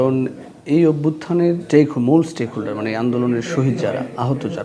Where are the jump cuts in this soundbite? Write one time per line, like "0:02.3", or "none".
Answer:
0:01.6